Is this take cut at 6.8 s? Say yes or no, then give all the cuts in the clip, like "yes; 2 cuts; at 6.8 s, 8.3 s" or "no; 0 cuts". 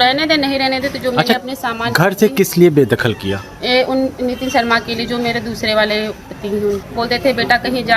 yes; 1 cut; at 6.8 s